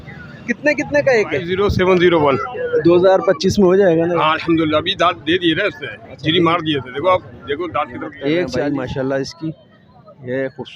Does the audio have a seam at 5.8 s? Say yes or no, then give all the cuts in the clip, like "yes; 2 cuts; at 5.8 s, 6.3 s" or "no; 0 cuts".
no; 2 cuts; at 1.5 s, 8.5 s